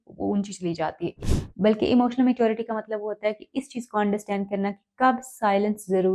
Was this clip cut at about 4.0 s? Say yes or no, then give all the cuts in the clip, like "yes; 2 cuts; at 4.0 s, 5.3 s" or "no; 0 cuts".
no; 1 cut; at 1.2 s